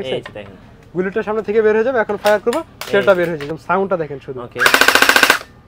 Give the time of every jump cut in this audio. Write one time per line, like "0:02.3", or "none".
0:03.4